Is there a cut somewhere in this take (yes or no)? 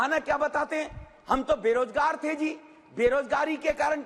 no